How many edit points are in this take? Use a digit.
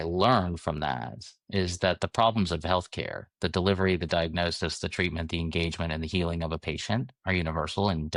0